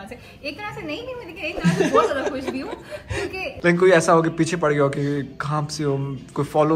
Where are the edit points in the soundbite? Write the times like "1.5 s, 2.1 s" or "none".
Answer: 3.6 s